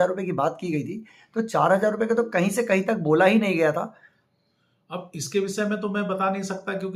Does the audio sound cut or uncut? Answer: uncut